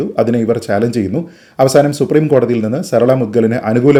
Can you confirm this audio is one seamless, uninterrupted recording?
yes; 0 cuts

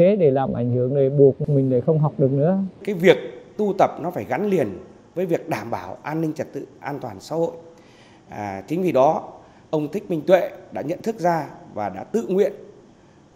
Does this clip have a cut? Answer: yes; 1 cut; at 2.8 s

